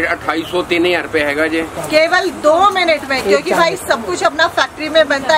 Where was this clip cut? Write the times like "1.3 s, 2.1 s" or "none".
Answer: 1.7 s